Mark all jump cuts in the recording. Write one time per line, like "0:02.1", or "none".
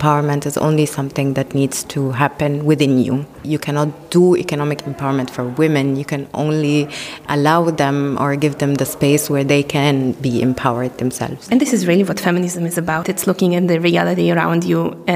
0:03.3
0:11.0
0:13.0